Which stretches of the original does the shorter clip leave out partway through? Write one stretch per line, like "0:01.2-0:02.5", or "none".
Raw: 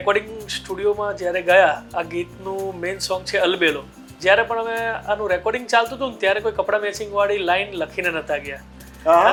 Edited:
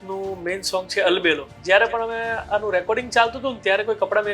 0:03.9-0:04.1